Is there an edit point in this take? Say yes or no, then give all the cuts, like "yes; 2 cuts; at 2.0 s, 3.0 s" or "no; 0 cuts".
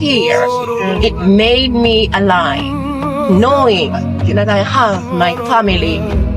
no; 0 cuts